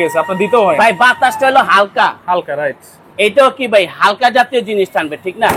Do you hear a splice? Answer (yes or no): no